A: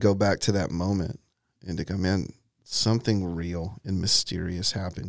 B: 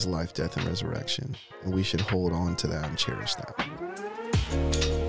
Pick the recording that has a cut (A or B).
B